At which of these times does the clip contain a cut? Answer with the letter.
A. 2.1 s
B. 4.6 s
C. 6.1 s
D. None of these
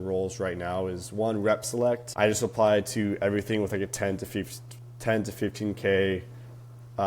A